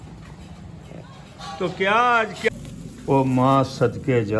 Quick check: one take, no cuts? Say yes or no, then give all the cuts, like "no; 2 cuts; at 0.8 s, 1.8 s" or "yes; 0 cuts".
no; 1 cut; at 2.5 s